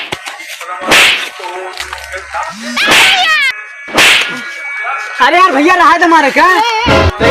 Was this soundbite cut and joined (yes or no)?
yes